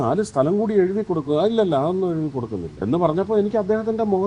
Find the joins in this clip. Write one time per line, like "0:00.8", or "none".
0:02.7